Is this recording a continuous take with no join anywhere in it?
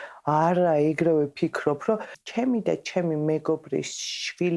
no; 1 cut; at 2.2 s

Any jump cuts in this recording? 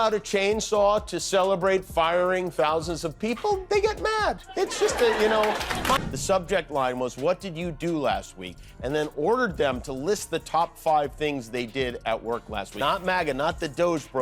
yes; 2 cuts; at 6.1 s, 12.7 s

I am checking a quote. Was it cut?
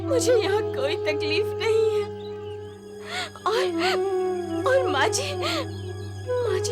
no; 0 cuts

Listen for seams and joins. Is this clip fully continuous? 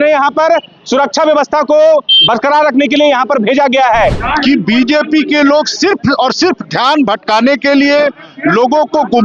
no; 1 cut; at 4.2 s

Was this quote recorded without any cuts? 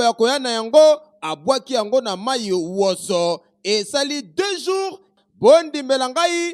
no; 1 cut; at 5.2 s

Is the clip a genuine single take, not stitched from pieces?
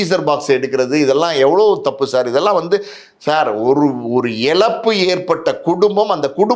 yes; 0 cuts

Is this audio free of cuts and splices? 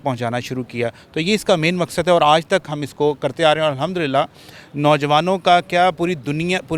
yes; 0 cuts

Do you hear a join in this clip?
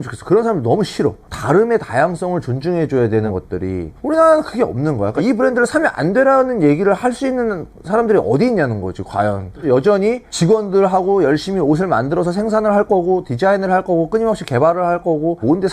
yes; 1 cut; at 1.2 s

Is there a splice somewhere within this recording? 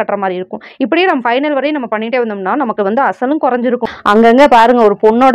yes; 1 cut; at 3.9 s

